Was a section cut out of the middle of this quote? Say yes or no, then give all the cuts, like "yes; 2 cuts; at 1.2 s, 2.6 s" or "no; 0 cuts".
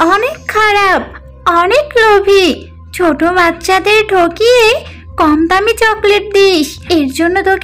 no; 0 cuts